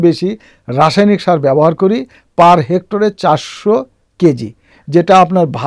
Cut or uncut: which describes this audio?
uncut